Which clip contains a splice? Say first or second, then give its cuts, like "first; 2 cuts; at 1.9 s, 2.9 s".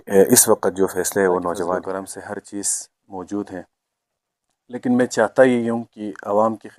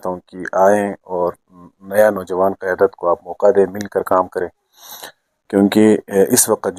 first; 1 cut; at 1.8 s